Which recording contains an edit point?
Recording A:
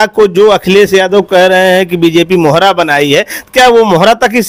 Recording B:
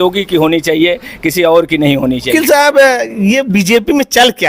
B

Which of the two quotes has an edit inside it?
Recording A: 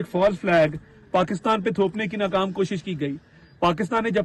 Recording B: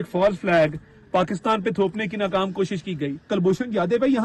B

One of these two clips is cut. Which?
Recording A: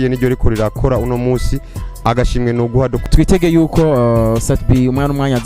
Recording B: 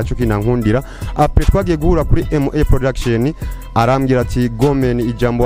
A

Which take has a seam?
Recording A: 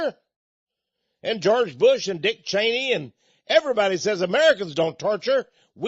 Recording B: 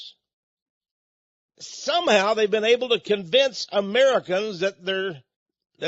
A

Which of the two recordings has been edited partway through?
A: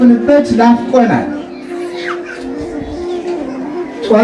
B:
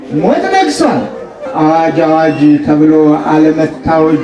B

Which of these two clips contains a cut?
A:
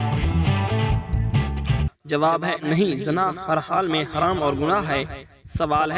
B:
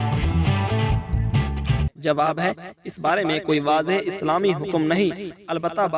A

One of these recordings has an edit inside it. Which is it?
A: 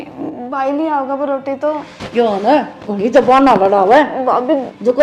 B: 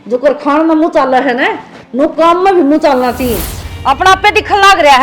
B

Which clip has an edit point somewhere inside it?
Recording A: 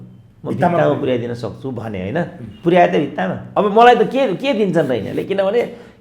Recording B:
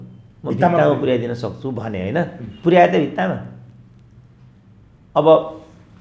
A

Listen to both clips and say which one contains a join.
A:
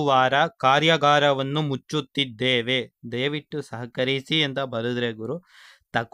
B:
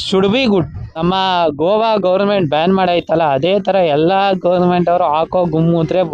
B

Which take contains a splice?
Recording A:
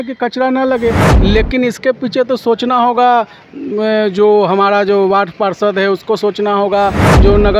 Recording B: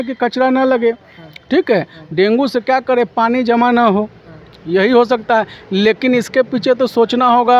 A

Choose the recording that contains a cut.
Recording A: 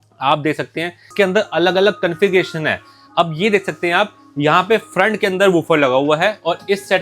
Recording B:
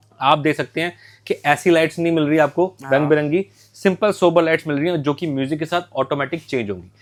A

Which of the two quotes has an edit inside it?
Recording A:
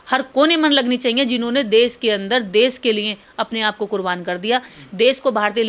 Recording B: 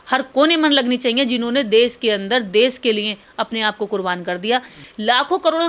B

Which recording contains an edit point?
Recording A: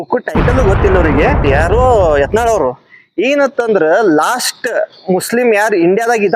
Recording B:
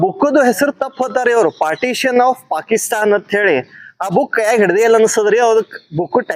A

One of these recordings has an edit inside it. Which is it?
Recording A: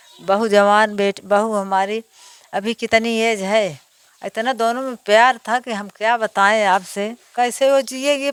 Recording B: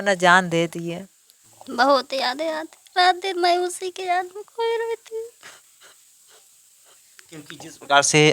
B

